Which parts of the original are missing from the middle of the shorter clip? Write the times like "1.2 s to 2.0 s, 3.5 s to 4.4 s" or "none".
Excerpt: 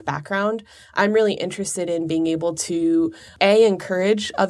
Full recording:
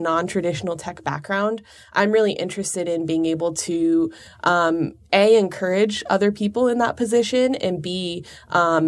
4.2 s to 5.0 s